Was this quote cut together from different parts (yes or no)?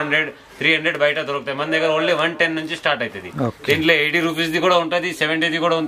no